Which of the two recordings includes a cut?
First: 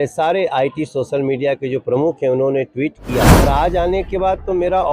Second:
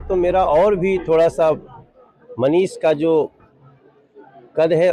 first; 1 cut; at 3.3 s

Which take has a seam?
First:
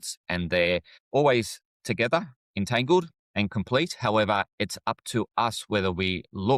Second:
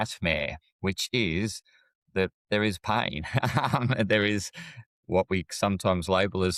first; 2 cuts; at 0.9 s, 3.2 s

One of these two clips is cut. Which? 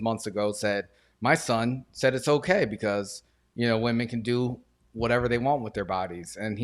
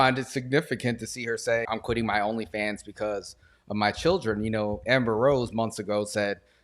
second; 1 cut; at 1.6 s

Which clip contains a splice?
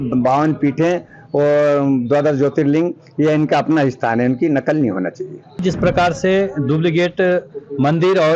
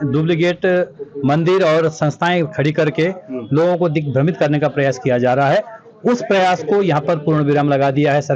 first; 1 cut; at 5.6 s

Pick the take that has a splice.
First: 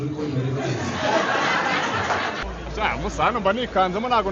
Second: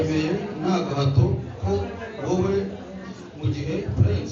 first; 1 cut; at 2.4 s

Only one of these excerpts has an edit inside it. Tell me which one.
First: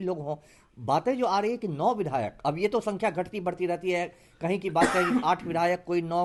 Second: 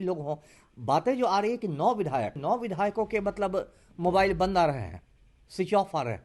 second; 1 cut; at 2.4 s

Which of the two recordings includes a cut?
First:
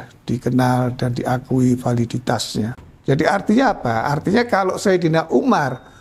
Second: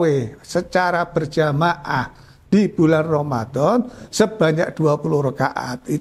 first; 1 cut; at 2.9 s

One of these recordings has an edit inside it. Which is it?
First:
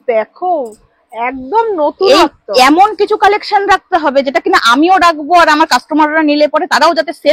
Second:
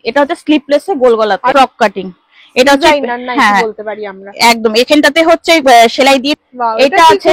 second; 2 cuts; at 1.5 s, 6.3 s

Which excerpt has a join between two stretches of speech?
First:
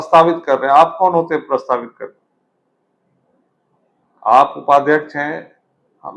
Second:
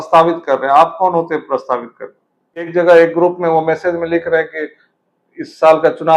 second; 1 cut; at 2.7 s

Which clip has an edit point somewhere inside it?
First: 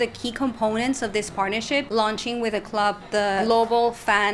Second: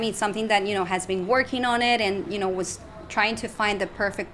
first; 2 cuts; at 1.9 s, 3.4 s

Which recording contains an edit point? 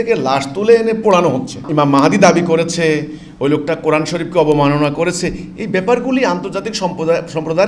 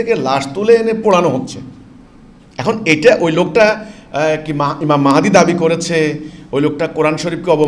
first; 1 cut; at 1.6 s

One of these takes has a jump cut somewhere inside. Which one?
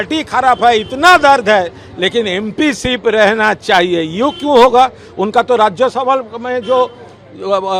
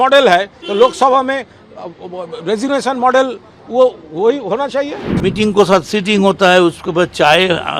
second; 1 cut; at 5.0 s

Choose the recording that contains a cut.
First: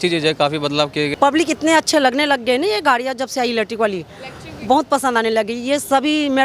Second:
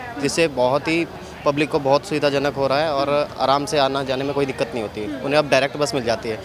first; 1 cut; at 1.1 s

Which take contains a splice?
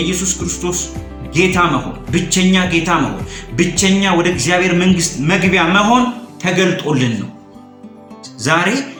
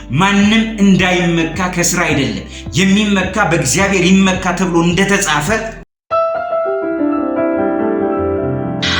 second; 1 cut; at 6.0 s

